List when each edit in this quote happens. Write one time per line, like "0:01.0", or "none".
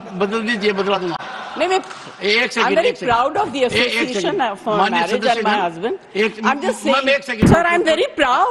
0:07.5